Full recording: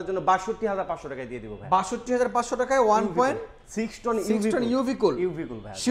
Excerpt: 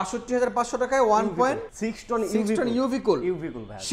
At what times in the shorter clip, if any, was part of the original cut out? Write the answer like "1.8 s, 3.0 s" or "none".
1.7 s